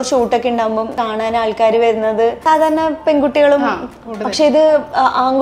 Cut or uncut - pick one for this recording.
cut